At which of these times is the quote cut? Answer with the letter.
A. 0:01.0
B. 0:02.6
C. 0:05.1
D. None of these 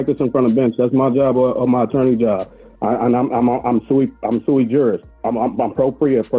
C